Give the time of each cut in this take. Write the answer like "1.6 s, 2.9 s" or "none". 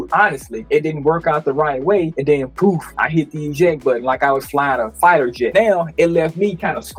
none